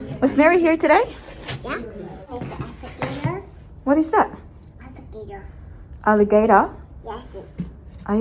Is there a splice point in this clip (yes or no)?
yes